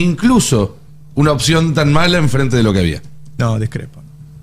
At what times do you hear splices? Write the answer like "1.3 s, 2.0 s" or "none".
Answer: none